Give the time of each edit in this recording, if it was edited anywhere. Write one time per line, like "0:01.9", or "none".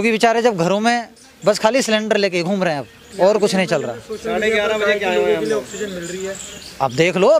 none